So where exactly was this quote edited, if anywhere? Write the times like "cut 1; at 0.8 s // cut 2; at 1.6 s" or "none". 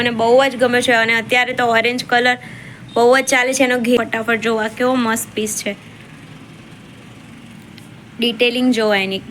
cut 1; at 4.0 s